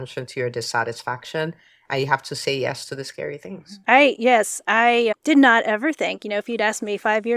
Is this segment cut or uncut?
uncut